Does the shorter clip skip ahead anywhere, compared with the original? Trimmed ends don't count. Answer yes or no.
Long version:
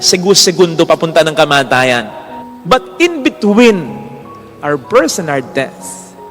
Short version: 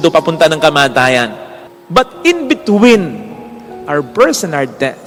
no